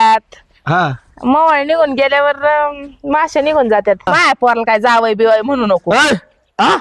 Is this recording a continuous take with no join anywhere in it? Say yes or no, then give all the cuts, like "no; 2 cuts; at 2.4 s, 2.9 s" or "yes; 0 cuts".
no; 1 cut; at 4.1 s